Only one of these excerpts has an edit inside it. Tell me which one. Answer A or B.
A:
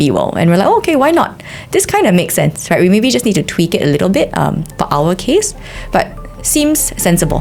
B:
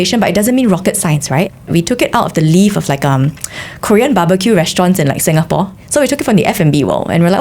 B